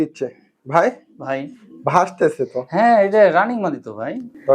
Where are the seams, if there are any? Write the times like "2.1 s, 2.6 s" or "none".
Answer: none